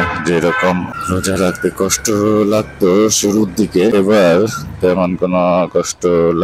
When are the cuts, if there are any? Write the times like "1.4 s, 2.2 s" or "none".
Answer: 0.9 s, 3.9 s